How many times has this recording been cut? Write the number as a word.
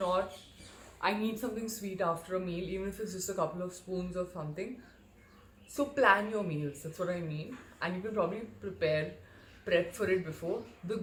zero